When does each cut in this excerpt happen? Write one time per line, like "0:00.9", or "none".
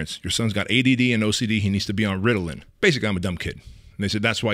0:02.6